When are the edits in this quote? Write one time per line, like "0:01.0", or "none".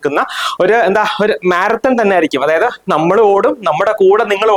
none